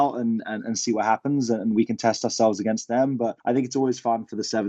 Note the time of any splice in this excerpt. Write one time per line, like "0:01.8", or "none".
0:03.4